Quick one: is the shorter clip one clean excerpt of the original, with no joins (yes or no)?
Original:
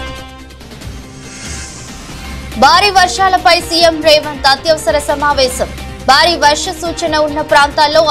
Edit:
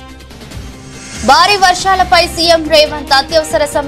no